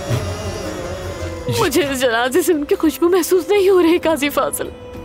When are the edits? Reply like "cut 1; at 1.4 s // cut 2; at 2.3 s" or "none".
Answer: cut 1; at 1.4 s